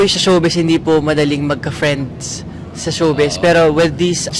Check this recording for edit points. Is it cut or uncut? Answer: uncut